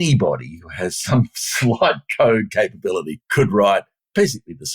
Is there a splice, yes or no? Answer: yes